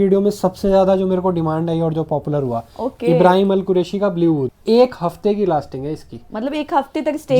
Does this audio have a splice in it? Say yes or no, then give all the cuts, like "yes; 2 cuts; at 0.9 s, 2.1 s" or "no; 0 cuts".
yes; 1 cut; at 4.5 s